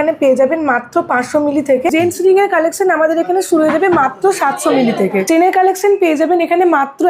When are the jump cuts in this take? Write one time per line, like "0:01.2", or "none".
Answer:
0:01.9
0:05.3